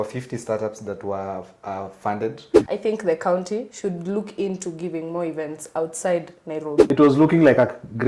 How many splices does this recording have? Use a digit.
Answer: 2